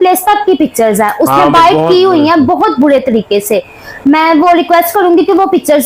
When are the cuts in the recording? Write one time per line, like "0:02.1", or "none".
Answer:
none